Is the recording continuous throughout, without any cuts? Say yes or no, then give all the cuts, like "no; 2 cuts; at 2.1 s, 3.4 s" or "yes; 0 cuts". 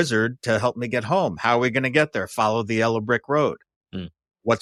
yes; 0 cuts